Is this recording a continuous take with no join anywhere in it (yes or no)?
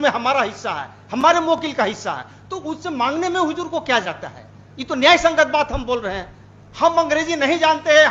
yes